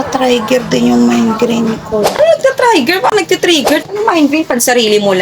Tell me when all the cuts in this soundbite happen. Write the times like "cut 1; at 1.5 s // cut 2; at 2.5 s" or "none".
cut 1; at 3.9 s

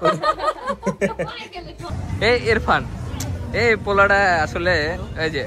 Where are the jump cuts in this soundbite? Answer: cut 1; at 2.0 s

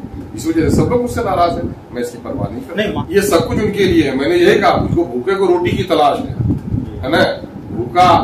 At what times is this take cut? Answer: cut 1; at 2.9 s

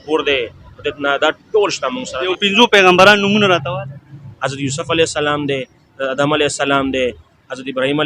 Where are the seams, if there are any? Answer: cut 1; at 2.3 s

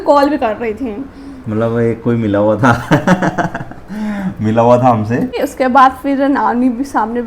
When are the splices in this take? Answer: cut 1; at 5.5 s

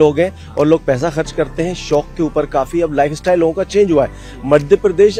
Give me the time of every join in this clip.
none

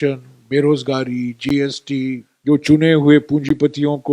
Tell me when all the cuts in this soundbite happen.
cut 1; at 2.3 s

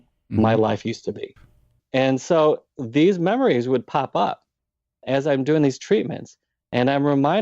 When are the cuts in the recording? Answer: cut 1; at 1.8 s // cut 2; at 5.0 s

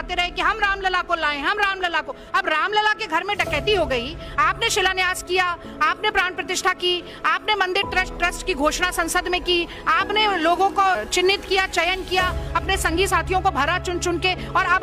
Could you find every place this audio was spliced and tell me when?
none

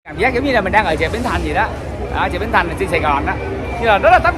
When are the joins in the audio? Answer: none

